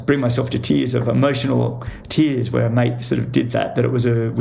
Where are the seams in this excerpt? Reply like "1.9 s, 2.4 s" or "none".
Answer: none